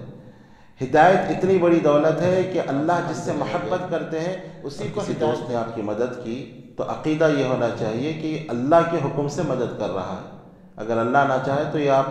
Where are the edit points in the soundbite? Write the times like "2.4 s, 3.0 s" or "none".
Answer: 5.1 s